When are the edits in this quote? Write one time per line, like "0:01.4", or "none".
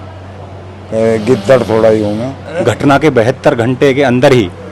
0:02.4